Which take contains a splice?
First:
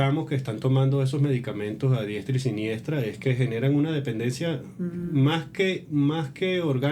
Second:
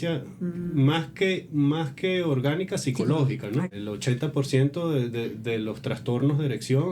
second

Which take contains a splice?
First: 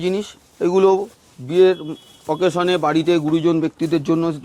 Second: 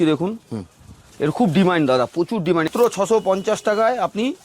second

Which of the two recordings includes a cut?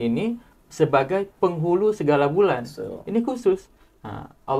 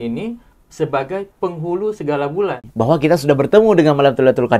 second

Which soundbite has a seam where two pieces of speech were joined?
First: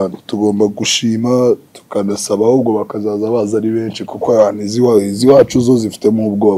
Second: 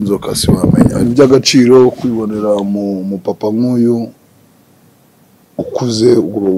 second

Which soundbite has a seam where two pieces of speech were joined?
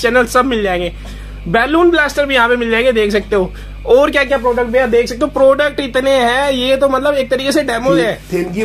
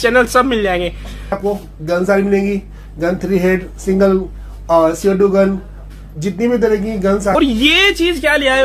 second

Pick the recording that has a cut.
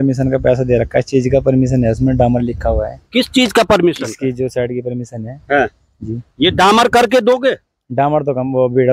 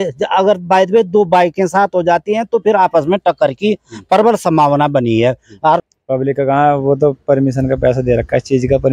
second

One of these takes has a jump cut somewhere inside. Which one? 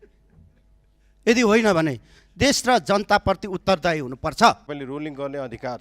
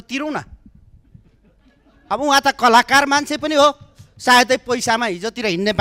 first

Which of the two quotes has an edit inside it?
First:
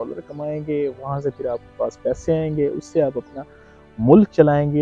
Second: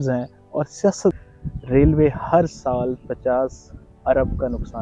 second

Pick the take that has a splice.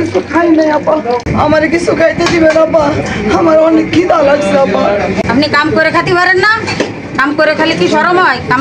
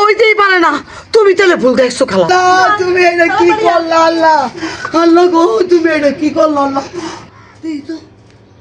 second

